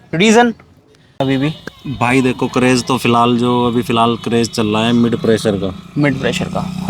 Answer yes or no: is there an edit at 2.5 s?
no